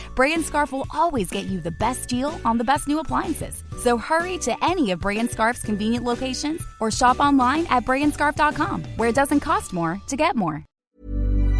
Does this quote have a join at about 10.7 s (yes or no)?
yes